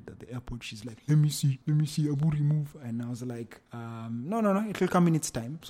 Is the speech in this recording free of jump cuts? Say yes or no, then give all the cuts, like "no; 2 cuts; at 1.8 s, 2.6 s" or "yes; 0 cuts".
yes; 0 cuts